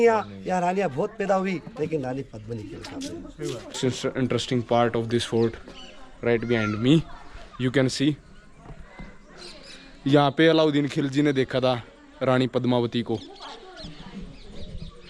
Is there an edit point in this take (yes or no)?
yes